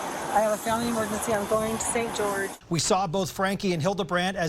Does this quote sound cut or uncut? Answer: cut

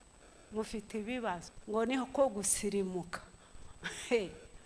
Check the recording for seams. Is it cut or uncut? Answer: cut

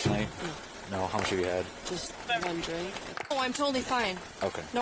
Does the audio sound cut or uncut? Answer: cut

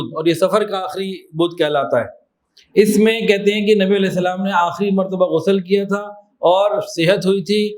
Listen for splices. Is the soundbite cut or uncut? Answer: uncut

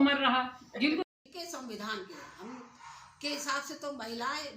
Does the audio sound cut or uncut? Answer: cut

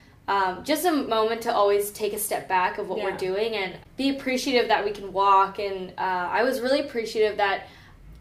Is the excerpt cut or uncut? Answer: cut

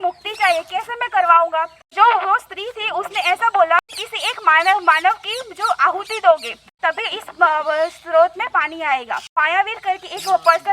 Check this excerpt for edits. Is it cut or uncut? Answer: cut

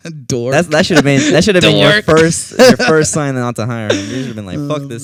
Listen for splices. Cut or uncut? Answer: uncut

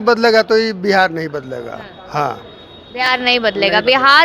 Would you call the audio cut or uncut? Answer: uncut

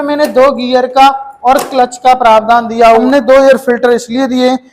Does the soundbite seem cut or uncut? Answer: cut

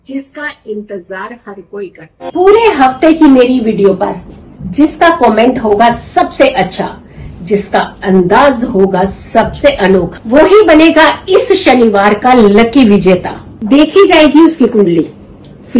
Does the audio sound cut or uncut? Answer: cut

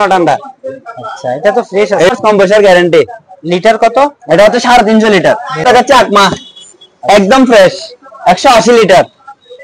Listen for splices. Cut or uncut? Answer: cut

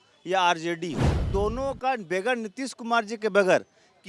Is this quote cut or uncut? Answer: cut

